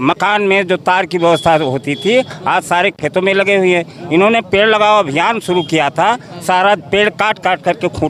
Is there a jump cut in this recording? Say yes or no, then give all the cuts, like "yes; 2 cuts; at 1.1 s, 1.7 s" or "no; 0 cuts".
no; 0 cuts